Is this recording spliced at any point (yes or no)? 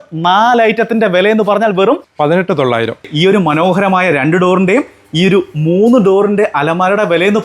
yes